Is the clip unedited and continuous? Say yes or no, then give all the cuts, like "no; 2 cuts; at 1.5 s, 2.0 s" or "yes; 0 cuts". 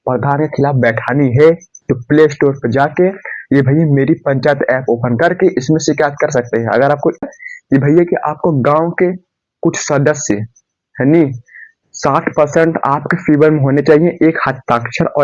no; 1 cut; at 7.2 s